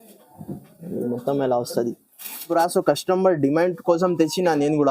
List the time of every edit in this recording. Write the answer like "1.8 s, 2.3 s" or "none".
2.5 s